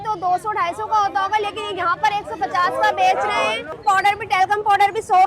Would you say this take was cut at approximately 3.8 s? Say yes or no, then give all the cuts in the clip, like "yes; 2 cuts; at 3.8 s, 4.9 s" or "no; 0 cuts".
yes; 1 cut; at 3.8 s